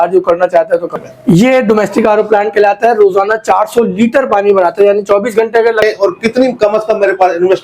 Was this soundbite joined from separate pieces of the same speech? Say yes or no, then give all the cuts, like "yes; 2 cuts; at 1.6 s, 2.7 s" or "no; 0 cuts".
yes; 2 cuts; at 0.9 s, 5.8 s